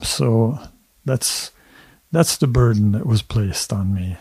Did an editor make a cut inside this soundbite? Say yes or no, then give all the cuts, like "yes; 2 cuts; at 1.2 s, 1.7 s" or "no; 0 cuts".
no; 0 cuts